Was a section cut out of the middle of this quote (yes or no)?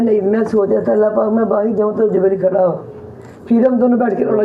no